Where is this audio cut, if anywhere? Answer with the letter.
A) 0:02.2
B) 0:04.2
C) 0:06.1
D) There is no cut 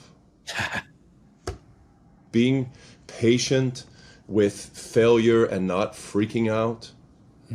A